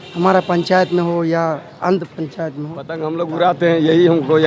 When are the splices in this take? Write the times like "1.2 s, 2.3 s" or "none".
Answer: 3.0 s